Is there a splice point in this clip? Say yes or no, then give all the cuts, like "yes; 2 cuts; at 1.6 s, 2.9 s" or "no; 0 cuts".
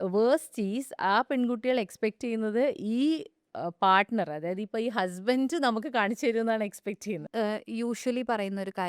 yes; 1 cut; at 7.2 s